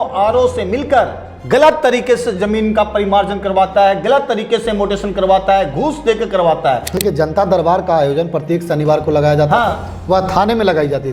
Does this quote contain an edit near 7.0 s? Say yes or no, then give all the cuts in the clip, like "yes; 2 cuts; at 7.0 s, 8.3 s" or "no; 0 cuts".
yes; 1 cut; at 7.0 s